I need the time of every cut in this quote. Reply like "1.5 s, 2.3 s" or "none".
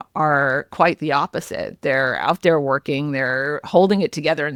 none